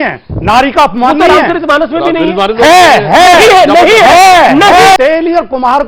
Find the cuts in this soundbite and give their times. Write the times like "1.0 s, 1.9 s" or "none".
5.0 s

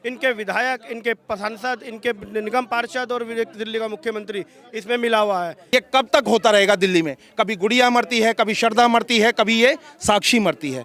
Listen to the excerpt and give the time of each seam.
5.6 s

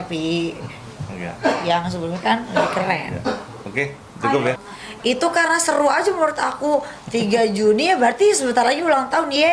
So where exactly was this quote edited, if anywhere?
4.7 s

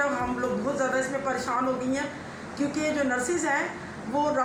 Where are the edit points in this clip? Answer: none

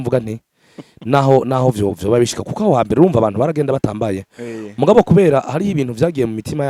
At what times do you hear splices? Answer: none

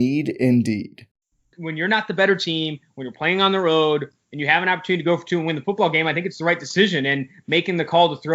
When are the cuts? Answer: 1.4 s

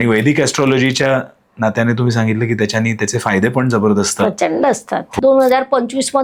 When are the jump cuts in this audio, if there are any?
5.1 s

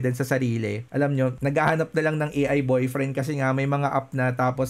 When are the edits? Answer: none

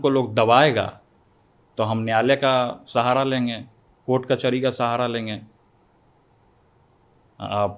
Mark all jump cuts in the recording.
none

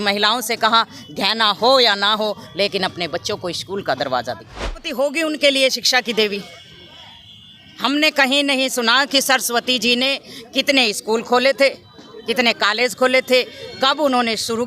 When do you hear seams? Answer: 4.9 s

